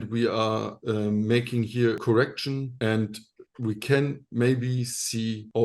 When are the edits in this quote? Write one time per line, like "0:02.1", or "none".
0:02.0